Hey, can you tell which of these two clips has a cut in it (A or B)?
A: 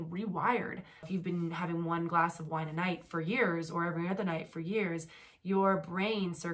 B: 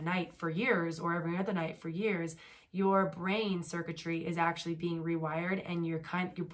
A